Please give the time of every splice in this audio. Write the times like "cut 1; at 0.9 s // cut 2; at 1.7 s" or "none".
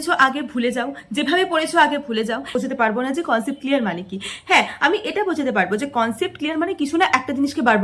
cut 1; at 2.5 s